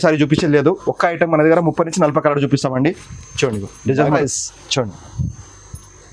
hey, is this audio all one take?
no; 1 cut; at 4.2 s

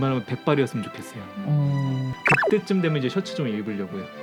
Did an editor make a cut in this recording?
no; 0 cuts

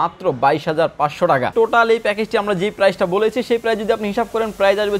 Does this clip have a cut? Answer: yes; 1 cut; at 1.5 s

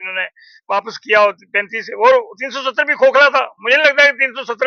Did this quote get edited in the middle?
no; 0 cuts

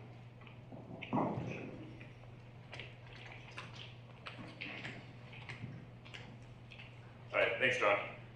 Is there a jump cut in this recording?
yes; 1 cut; at 2.1 s

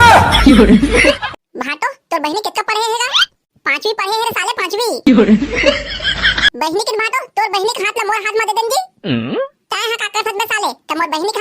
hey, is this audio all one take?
no; 1 cut; at 1.2 s

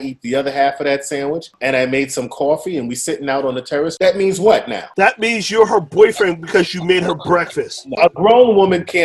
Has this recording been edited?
yes; 4 cuts; at 1.5 s, 3.9 s, 4.8 s, 8.0 s

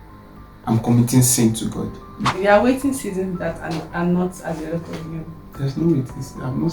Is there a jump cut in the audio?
yes; 1 cut; at 2.3 s

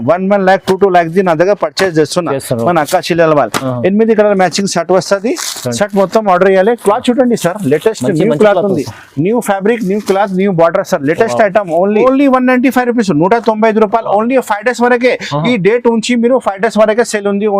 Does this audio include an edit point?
yes; 1 cut; at 12.0 s

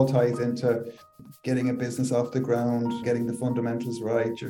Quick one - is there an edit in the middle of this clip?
yes; 2 cuts; at 1.1 s, 3.0 s

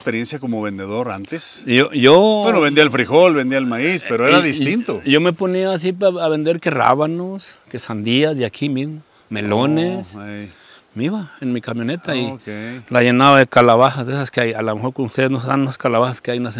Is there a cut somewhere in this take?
no; 0 cuts

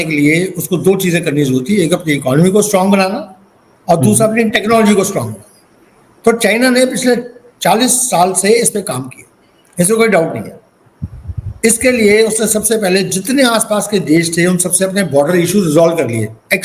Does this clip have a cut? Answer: no; 0 cuts

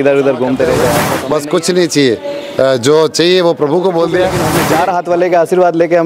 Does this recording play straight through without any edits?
no; 2 cuts; at 1.1 s, 4.6 s

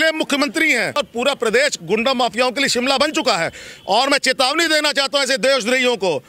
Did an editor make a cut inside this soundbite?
yes; 1 cut; at 1.0 s

